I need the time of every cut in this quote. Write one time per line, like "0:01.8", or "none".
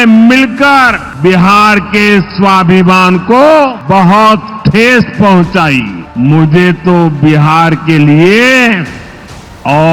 0:01.0
0:03.8
0:06.0